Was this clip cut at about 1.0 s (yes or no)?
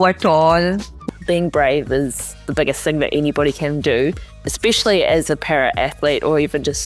yes